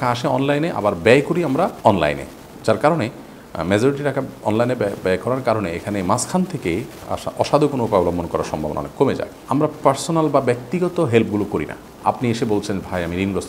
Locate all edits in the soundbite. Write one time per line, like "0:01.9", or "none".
0:01.7
0:09.3
0:11.9